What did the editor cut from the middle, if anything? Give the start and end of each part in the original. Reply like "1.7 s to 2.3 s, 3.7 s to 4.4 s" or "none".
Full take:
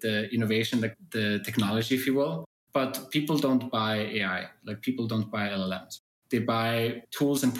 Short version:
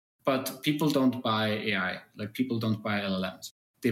none